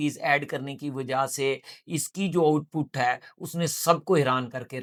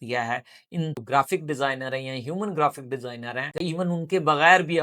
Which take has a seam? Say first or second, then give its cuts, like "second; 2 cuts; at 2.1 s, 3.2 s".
second; 2 cuts; at 0.9 s, 3.6 s